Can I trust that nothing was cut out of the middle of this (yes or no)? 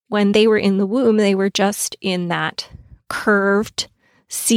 yes